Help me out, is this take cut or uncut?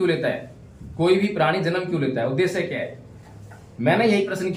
uncut